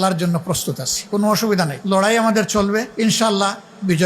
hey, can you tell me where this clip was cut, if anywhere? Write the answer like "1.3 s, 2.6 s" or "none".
0.9 s, 1.8 s, 2.9 s